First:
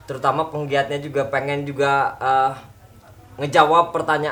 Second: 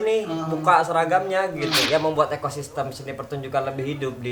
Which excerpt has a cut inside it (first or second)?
second